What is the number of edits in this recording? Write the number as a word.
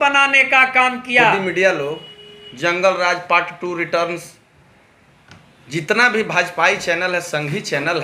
one